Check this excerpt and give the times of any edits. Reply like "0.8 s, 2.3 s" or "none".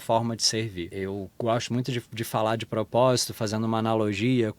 0.9 s